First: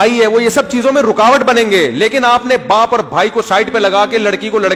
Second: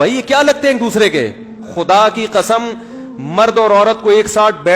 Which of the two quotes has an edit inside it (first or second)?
second